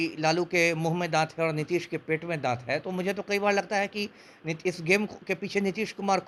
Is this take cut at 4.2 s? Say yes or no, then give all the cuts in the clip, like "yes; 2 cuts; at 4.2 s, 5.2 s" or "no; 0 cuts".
no; 0 cuts